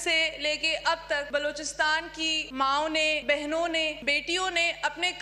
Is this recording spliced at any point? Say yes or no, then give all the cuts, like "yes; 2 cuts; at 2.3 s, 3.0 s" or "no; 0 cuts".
yes; 4 cuts; at 1.3 s, 2.4 s, 3.2 s, 4.0 s